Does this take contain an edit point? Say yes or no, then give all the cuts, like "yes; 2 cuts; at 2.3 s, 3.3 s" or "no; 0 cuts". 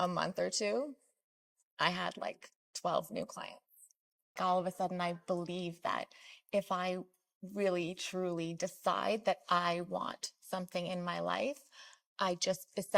yes; 1 cut; at 4.4 s